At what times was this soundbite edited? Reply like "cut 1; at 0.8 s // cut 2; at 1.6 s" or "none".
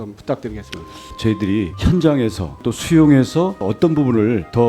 cut 1; at 1.1 s // cut 2; at 3.6 s